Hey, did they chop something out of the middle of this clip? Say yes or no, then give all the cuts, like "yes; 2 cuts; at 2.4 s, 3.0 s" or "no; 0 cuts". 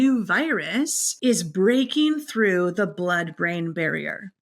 yes; 1 cut; at 1.0 s